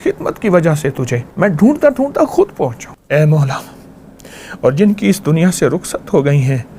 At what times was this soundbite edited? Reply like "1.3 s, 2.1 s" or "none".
1.2 s, 2.9 s